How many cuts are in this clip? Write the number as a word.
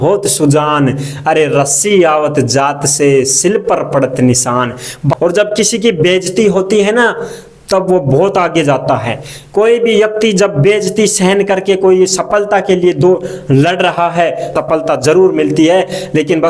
two